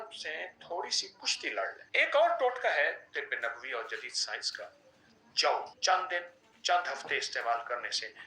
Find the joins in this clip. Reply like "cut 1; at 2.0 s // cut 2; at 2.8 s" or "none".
cut 1; at 1.8 s // cut 2; at 3.0 s // cut 3; at 5.7 s